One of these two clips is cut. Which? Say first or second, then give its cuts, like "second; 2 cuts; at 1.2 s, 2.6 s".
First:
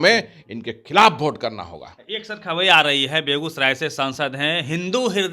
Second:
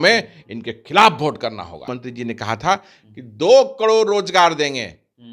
second; 1 cut; at 1.9 s